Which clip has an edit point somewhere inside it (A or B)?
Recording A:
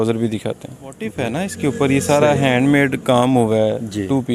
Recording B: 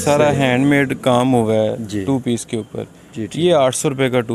A